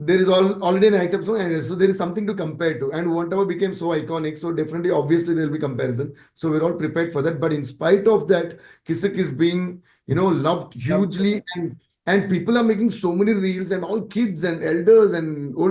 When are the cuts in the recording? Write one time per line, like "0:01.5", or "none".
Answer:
none